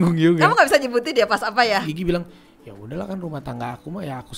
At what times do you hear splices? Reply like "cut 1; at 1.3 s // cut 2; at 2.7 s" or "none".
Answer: cut 1; at 1.9 s